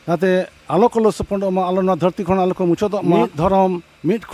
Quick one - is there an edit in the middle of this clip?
yes; 1 cut; at 3.3 s

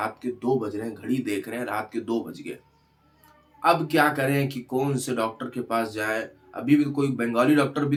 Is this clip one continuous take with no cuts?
yes; 0 cuts

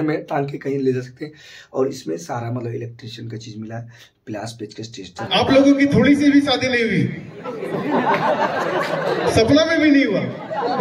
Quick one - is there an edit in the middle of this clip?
yes; 1 cut; at 5.3 s

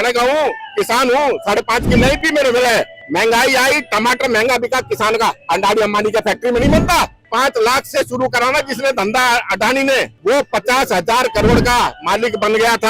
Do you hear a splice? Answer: yes; 3 cuts; at 3.0 s, 7.2 s, 10.1 s

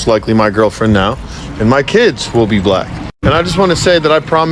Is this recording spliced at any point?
no; 0 cuts

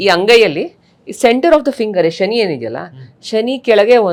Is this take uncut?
yes; 0 cuts

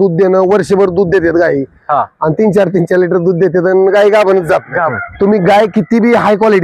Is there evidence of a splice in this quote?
yes; 1 cut; at 5.0 s

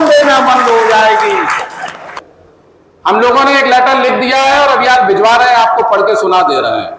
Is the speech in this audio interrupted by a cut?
no; 0 cuts

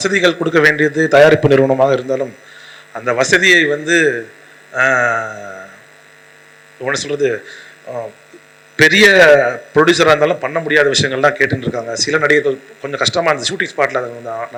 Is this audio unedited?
yes; 0 cuts

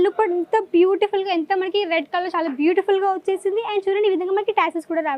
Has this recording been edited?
no; 0 cuts

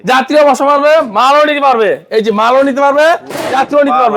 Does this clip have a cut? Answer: no; 0 cuts

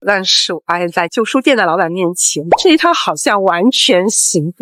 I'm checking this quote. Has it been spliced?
no; 0 cuts

